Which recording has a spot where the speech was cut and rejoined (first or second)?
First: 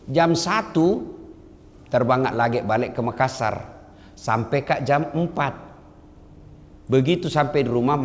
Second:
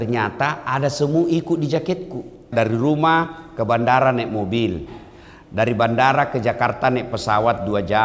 second